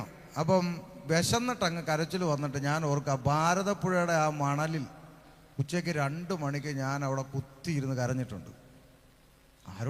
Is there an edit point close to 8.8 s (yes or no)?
no